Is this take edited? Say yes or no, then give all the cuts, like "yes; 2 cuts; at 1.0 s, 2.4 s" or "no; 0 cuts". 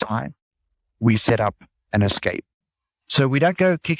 yes; 1 cut; at 3.0 s